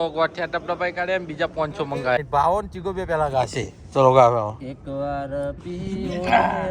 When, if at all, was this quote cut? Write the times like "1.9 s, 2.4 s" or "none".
2.2 s